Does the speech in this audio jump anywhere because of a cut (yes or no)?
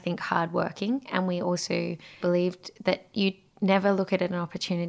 yes